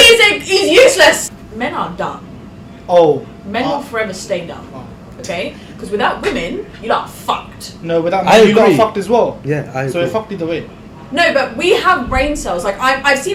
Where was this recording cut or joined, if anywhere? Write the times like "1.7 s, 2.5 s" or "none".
1.3 s